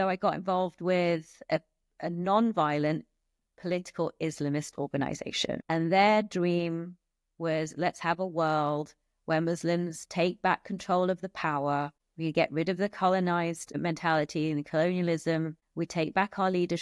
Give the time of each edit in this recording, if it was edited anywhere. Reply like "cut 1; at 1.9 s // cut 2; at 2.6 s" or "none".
cut 1; at 5.6 s // cut 2; at 12.0 s // cut 3; at 13.8 s // cut 4; at 15.6 s